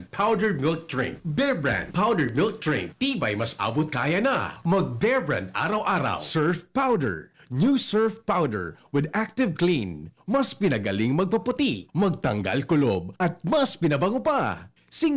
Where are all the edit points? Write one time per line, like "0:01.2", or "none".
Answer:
0:06.1